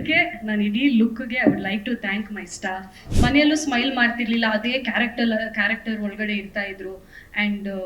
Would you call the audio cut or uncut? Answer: cut